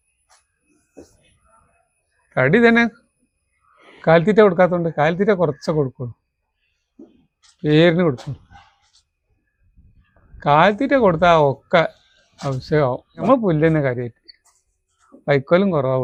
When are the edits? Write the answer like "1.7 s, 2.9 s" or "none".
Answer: none